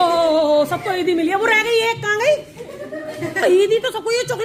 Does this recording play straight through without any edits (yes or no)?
yes